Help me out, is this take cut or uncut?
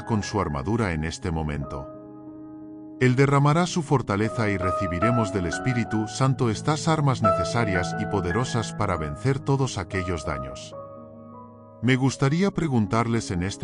cut